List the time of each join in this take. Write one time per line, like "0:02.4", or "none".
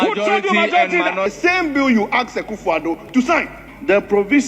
0:01.3